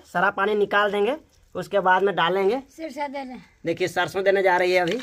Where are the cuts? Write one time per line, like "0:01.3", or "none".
none